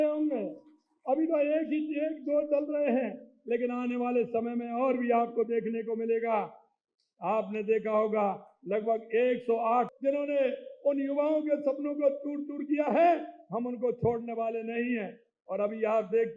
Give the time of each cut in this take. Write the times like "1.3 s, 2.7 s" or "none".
9.9 s